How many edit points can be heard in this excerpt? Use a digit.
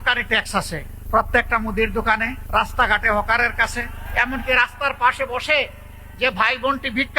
3